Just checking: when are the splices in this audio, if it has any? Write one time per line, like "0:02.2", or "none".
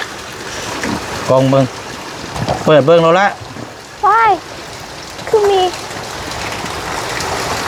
none